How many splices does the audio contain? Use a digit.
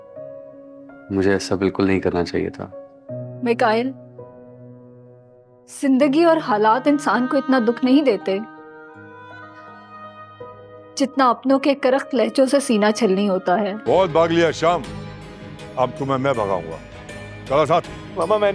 1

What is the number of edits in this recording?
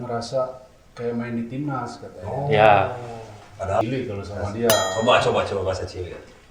1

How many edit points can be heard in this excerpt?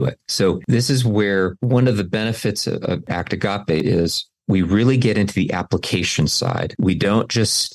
2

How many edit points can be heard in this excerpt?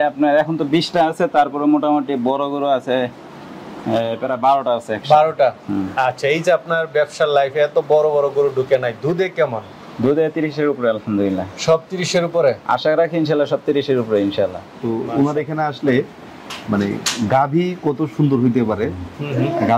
1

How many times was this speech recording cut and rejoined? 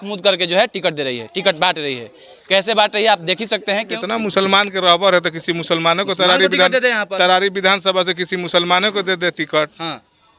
1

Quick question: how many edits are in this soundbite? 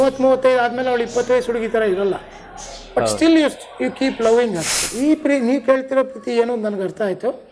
1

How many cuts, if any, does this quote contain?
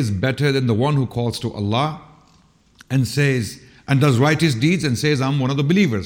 0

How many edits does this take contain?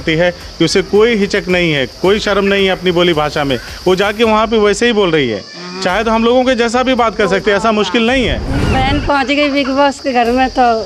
1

